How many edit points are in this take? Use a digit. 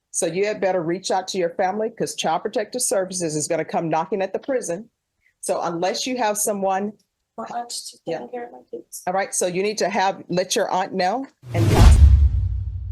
1